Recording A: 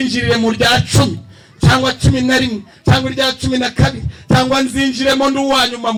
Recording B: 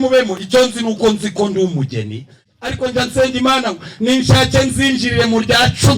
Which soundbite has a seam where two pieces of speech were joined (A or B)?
B